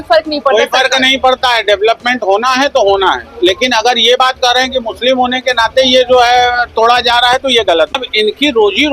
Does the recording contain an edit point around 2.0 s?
no; 1 cut; at 7.9 s

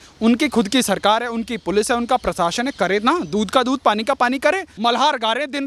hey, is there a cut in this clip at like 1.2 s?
no; 1 cut; at 4.7 s

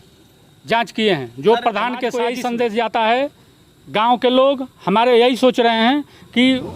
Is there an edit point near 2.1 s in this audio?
yes; 1 cut; at 2.1 s

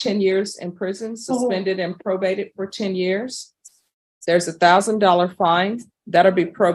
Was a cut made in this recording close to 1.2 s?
no; 0 cuts

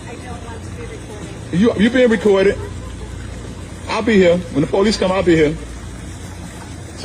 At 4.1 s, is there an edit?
no; 1 cut; at 5.5 s

